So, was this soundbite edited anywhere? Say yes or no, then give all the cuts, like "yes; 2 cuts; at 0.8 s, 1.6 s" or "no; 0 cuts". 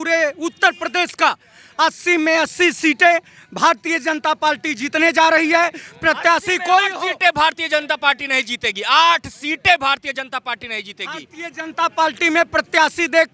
no; 0 cuts